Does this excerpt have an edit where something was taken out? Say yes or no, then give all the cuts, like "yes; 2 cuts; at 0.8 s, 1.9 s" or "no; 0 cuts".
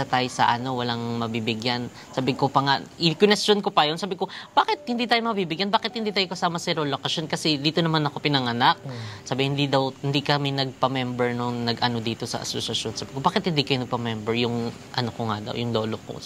no; 0 cuts